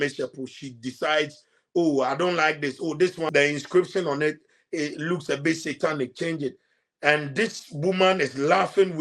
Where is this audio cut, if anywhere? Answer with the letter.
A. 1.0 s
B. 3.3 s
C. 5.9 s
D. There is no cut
B